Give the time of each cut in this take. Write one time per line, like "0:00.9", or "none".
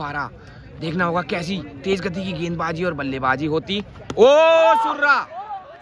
none